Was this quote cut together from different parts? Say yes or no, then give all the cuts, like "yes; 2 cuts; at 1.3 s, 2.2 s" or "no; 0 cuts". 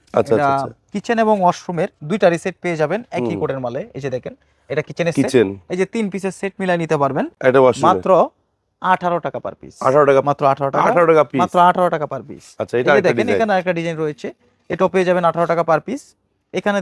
no; 0 cuts